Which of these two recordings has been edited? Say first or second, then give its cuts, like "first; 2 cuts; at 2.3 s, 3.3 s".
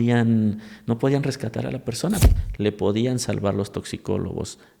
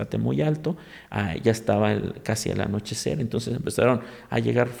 first; 1 cut; at 2.2 s